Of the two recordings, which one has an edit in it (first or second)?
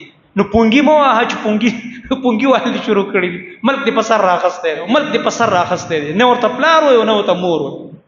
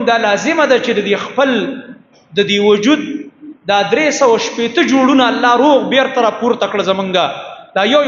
first